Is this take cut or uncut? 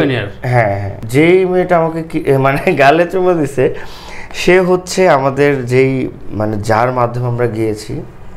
cut